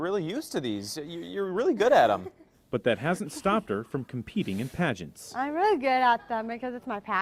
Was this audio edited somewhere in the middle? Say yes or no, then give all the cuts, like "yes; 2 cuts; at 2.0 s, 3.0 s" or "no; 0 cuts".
no; 0 cuts